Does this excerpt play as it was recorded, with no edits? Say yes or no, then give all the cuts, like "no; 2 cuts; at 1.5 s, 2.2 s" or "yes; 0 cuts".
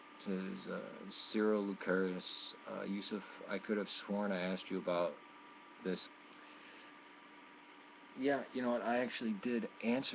yes; 0 cuts